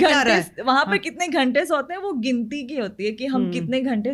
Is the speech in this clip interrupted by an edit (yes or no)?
no